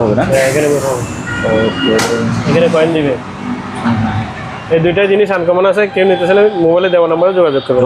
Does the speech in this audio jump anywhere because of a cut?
no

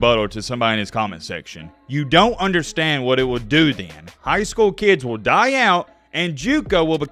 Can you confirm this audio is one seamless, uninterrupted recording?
yes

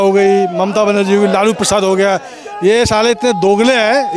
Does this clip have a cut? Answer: no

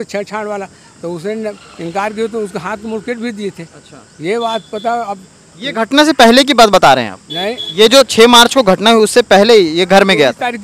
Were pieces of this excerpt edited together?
no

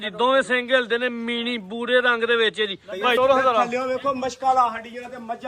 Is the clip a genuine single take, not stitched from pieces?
no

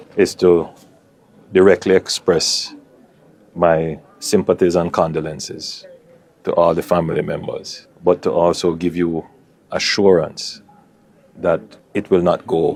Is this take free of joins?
yes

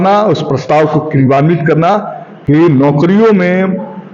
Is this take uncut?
yes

